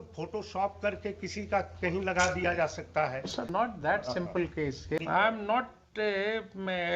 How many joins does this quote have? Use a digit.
2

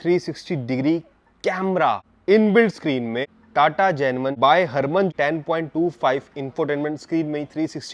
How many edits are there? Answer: 4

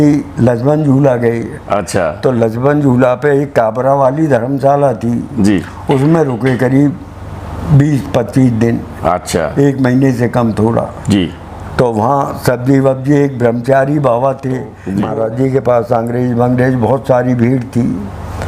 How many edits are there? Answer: 1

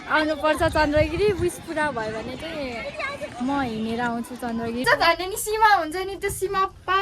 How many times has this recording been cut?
1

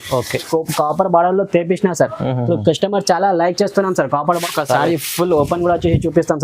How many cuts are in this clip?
1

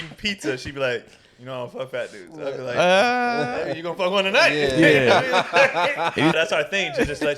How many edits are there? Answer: 1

